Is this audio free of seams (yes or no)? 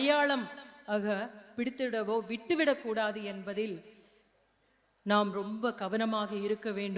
yes